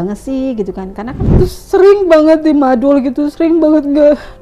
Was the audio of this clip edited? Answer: yes; 1 cut; at 1.2 s

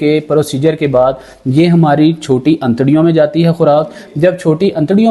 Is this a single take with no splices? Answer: yes; 0 cuts

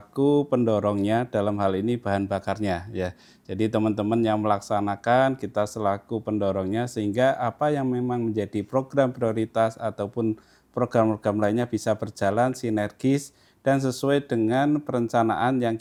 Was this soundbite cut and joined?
no; 0 cuts

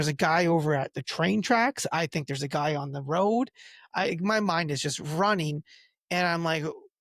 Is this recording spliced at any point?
no; 0 cuts

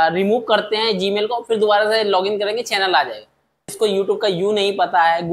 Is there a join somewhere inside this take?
yes; 1 cut; at 3.7 s

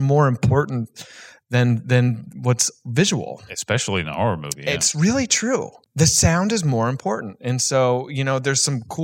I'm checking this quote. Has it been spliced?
yes; 1 cut; at 5.8 s

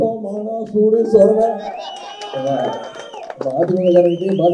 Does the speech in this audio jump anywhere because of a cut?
no; 0 cuts

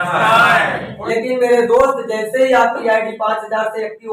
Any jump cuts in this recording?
yes; 1 cut; at 1.0 s

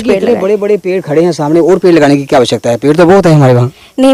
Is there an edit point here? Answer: no; 0 cuts

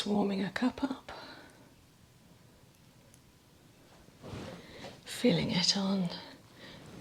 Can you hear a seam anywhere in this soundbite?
no; 0 cuts

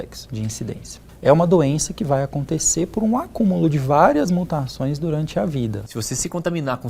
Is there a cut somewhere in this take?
yes; 2 cuts; at 0.9 s, 5.9 s

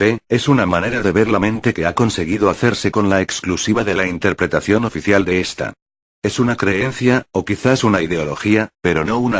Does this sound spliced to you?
no; 0 cuts

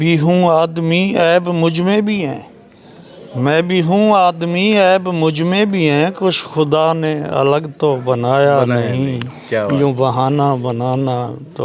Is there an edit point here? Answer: no; 0 cuts

